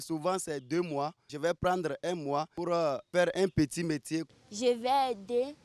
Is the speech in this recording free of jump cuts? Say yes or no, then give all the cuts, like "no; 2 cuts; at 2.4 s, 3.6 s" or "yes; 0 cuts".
no; 1 cut; at 4.2 s